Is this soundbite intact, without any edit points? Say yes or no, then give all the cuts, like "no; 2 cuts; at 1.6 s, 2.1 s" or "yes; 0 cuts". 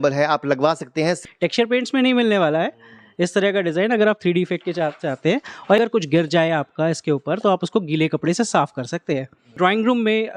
no; 3 cuts; at 1.2 s, 5.8 s, 9.5 s